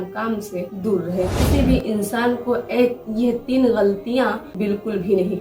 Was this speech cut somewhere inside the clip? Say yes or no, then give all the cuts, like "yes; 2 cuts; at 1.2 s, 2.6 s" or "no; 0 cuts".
yes; 2 cuts; at 1.4 s, 4.5 s